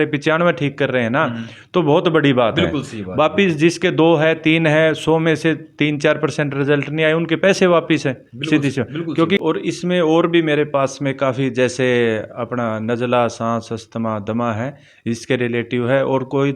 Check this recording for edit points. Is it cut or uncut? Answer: cut